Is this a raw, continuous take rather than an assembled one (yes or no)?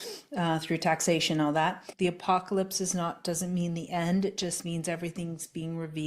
no